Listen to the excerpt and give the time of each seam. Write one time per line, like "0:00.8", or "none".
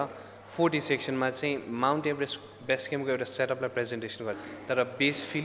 0:04.4